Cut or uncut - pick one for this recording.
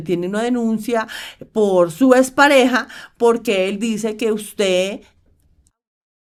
uncut